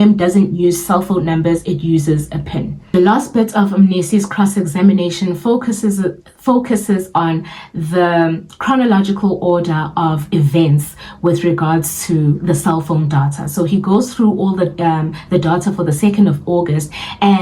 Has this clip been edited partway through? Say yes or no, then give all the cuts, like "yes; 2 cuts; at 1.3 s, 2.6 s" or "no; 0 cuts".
no; 0 cuts